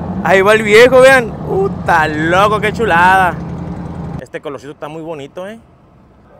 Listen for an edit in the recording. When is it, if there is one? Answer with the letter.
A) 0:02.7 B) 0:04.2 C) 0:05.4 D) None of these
B